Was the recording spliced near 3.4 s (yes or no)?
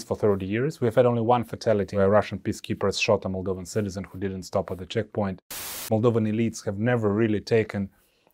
no